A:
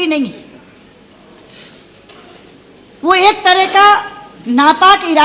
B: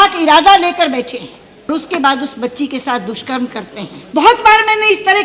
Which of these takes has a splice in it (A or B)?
B